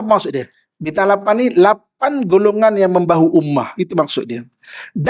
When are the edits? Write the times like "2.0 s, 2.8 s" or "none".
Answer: 0.9 s